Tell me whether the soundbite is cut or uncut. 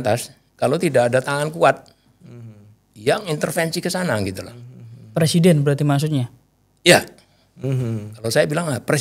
uncut